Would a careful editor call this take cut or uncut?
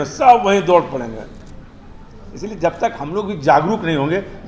uncut